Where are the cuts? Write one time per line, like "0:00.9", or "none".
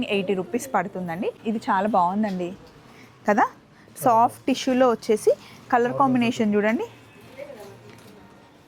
0:01.4

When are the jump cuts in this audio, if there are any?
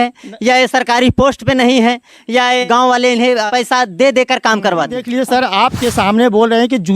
0:05.0

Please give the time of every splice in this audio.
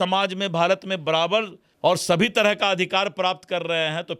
0:01.6

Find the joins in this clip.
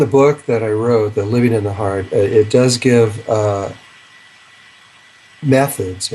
0:04.6

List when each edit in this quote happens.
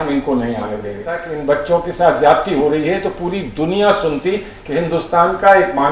0:01.3

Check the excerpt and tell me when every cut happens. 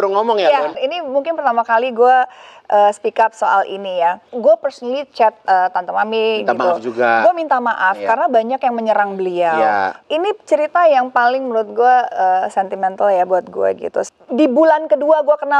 0:00.9
0:04.3
0:09.9
0:14.1

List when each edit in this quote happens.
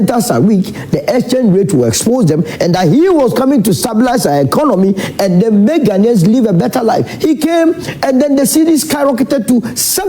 0:06.7

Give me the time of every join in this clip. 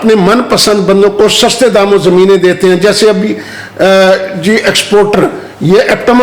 none

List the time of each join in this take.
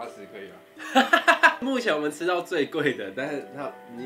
0:01.6

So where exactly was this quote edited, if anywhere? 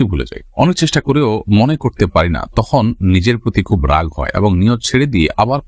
none

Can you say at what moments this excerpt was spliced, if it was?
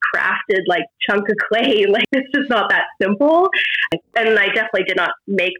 0:00.9
0:02.0
0:04.1

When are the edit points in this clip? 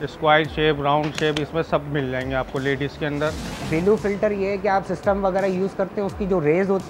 0:03.5

